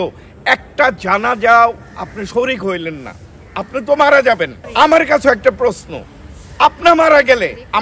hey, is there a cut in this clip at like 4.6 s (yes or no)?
yes